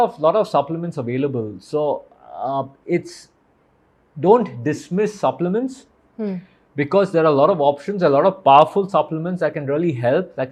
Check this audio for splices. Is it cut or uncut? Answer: uncut